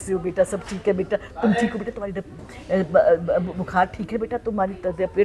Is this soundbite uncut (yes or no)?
yes